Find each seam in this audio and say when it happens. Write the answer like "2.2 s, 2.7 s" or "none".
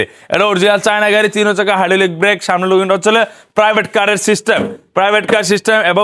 none